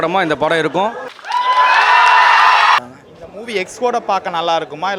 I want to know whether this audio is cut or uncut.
cut